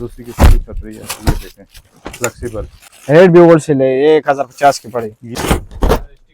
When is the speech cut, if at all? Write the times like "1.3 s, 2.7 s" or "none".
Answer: 5.2 s